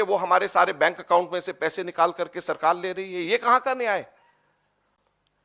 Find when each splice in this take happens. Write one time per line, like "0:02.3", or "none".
none